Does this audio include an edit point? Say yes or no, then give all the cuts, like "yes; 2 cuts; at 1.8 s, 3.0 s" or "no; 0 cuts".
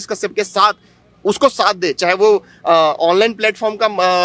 no; 0 cuts